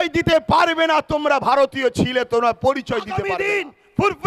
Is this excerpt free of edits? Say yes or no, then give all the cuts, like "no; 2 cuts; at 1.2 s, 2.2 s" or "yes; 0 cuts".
no; 1 cut; at 3.3 s